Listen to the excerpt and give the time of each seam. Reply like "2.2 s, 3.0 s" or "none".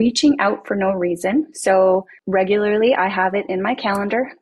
2.2 s